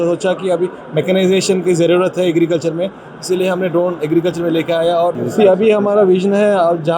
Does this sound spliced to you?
yes; 1 cut; at 5.2 s

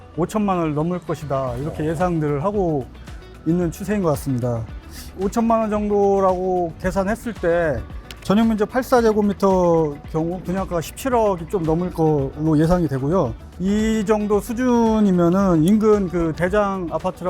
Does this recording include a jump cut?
no; 0 cuts

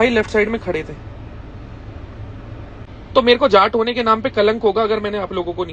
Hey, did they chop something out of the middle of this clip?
yes; 1 cut; at 2.9 s

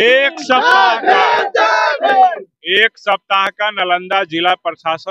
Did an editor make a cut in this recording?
no; 0 cuts

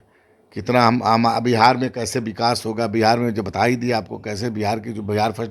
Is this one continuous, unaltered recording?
yes; 0 cuts

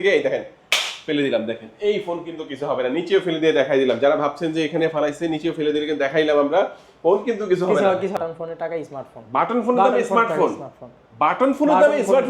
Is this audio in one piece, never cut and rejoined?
no; 1 cut; at 8.1 s

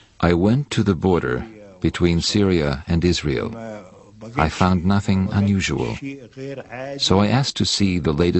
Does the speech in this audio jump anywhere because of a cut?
yes; 1 cut; at 3.6 s

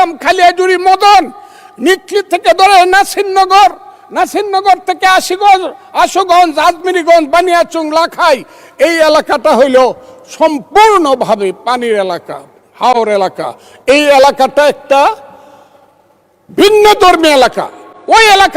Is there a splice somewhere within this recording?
no; 0 cuts

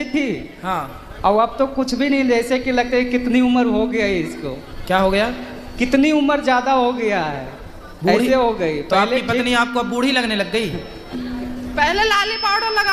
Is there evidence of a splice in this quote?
no; 0 cuts

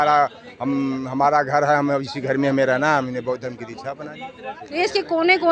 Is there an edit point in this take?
yes; 1 cut; at 4.6 s

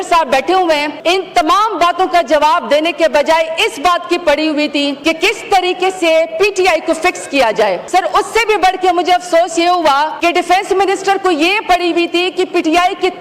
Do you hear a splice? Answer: yes; 4 cuts; at 0.9 s, 5.0 s, 7.8 s, 10.1 s

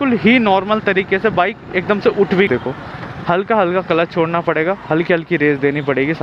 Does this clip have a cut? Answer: yes; 1 cut; at 2.5 s

